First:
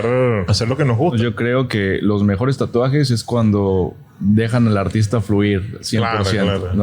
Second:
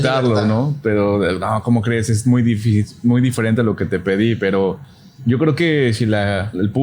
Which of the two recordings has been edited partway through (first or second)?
first